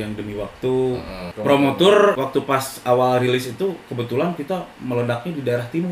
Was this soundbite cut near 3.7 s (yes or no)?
no